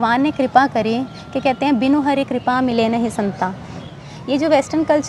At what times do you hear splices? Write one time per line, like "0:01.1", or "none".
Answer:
0:03.9